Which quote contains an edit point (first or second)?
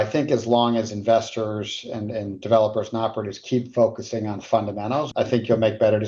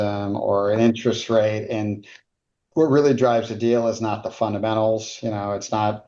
first